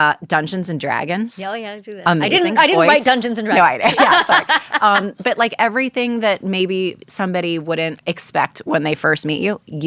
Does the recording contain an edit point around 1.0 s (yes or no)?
no